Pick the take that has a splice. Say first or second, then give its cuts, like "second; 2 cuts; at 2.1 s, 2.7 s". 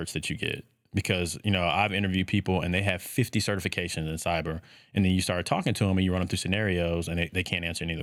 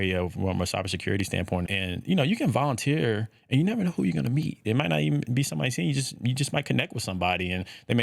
second; 2 cuts; at 1.7 s, 4.6 s